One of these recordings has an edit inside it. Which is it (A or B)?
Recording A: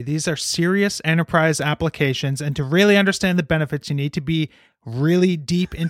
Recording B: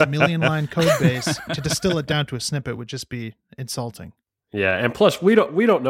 B